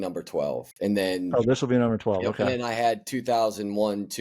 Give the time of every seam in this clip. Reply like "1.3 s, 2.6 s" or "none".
none

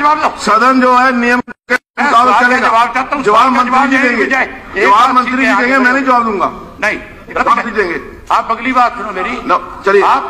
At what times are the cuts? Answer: none

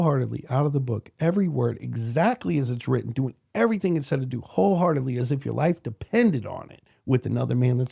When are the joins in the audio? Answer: none

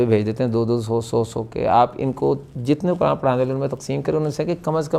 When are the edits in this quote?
none

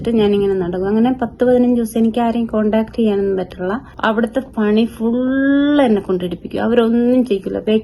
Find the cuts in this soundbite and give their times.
3.9 s

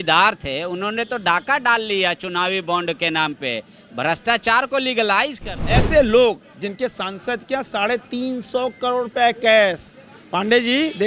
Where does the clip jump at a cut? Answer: 5.5 s

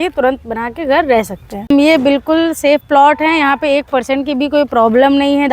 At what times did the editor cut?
1.7 s

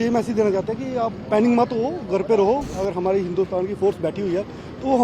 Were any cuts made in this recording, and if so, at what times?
2.7 s

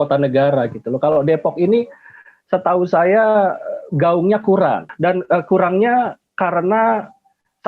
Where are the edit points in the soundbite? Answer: 4.9 s

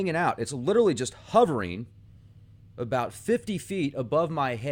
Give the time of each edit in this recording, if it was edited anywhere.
1.1 s

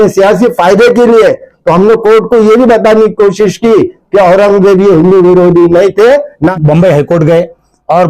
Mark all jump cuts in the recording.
6.5 s

